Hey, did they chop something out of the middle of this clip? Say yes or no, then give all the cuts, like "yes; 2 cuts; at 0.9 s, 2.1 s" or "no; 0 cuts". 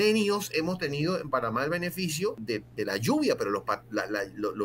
yes; 1 cut; at 2.4 s